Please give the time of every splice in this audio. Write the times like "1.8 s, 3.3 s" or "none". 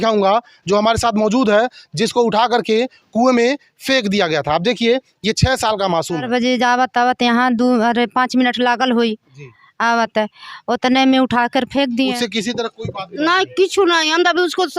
6.3 s, 12.2 s